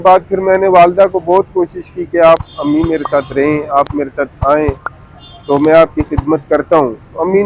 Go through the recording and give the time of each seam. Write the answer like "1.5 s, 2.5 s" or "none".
none